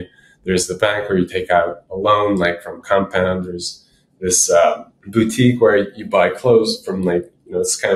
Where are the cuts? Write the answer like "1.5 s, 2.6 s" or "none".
4.9 s